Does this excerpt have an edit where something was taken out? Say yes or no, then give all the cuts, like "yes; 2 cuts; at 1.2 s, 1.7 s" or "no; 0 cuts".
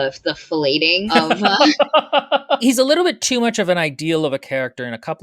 yes; 2 cuts; at 1.1 s, 2.6 s